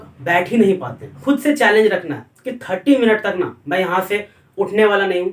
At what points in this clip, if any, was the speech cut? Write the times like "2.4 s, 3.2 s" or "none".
1.2 s